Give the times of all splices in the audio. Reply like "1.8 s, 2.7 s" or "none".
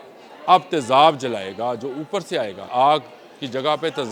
2.7 s